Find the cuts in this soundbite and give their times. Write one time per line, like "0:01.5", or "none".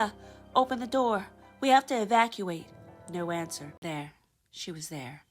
0:03.8

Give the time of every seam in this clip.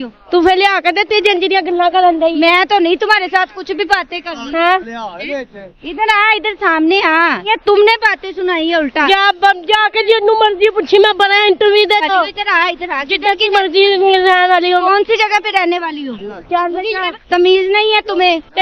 0:07.5
0:12.0
0:17.1

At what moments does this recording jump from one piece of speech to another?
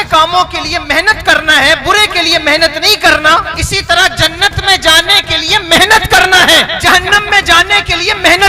0:03.6
0:06.7

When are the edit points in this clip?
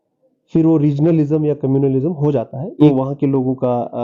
0:02.9

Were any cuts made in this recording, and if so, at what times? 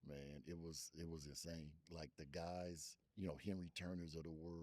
0:01.9
0:03.0

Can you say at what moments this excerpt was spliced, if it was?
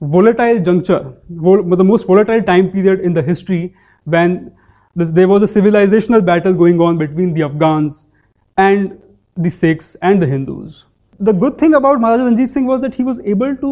0:11.1

